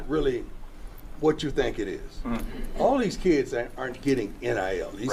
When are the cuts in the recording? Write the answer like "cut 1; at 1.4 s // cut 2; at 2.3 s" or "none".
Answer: none

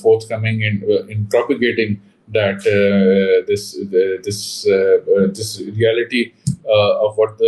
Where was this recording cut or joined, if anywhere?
none

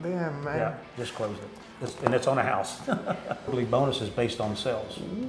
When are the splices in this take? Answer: cut 1; at 3.5 s

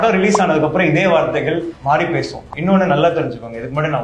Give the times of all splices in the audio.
cut 1; at 1.7 s // cut 2; at 2.4 s

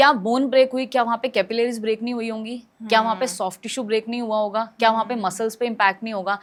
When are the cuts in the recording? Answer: none

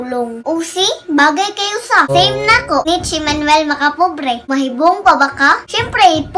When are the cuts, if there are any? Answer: cut 1; at 2.1 s // cut 2; at 2.9 s // cut 3; at 4.5 s

